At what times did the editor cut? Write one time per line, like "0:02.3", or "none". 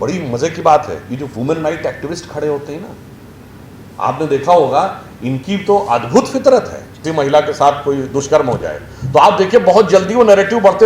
0:07.0